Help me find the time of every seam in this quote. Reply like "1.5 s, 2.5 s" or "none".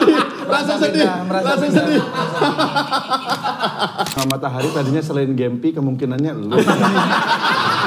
4.2 s